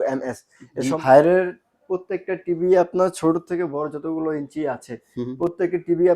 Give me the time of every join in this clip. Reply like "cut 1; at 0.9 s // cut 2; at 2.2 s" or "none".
cut 1; at 1.0 s